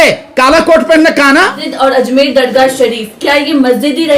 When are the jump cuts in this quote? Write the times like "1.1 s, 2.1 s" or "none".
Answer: 1.6 s